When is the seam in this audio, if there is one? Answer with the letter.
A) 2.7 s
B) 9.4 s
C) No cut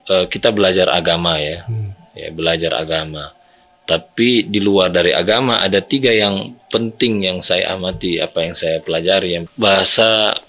B